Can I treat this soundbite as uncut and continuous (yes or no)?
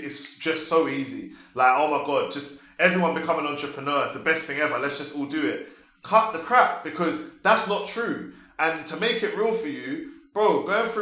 yes